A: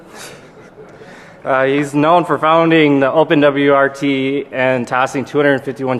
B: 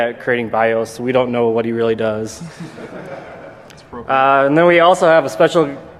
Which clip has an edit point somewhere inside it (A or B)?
A